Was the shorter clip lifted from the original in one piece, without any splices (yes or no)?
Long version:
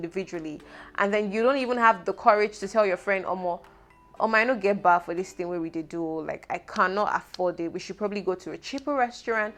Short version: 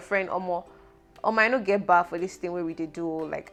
yes